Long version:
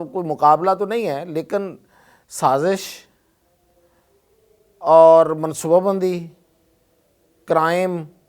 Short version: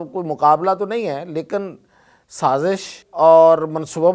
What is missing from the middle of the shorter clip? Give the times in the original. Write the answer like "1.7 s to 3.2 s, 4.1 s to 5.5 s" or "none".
3.0 s to 4.6 s